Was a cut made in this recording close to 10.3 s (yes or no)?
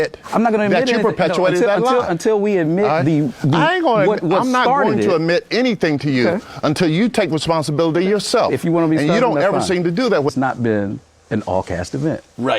yes